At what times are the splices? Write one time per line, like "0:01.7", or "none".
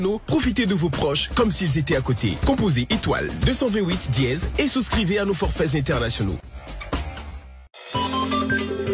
none